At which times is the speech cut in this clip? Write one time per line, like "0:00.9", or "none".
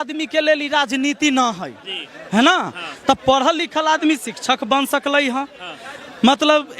none